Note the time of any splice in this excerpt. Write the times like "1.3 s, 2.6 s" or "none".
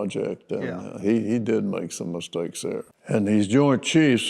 2.9 s